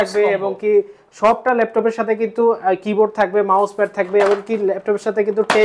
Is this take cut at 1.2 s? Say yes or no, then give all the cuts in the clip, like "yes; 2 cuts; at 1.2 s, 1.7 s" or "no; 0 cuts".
no; 0 cuts